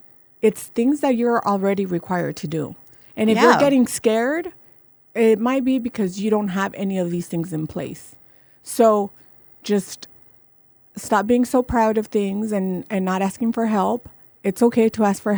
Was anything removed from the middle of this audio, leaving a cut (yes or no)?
no